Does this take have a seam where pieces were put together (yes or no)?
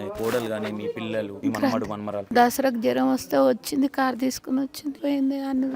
yes